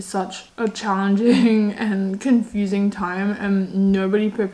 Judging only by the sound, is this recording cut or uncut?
uncut